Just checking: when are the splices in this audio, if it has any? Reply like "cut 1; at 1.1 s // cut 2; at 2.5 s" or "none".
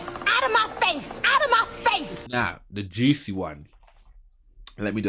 cut 1; at 2.2 s